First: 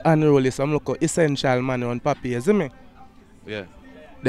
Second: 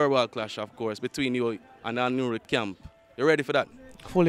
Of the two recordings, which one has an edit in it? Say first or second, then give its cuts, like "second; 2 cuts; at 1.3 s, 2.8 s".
second; 1 cut; at 2.4 s